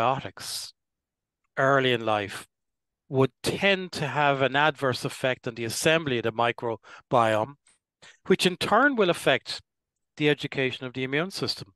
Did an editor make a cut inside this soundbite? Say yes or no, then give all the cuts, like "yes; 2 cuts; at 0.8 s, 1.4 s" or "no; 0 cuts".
no; 0 cuts